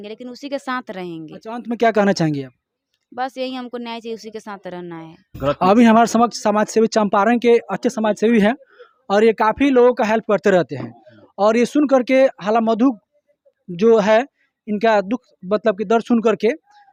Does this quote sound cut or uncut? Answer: uncut